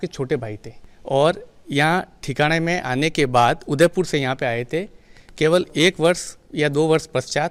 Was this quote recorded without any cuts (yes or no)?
yes